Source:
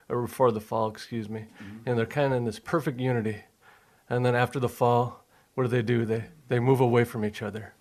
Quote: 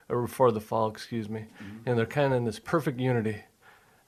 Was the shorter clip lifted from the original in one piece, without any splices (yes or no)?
yes